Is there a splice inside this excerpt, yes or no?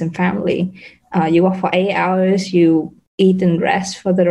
no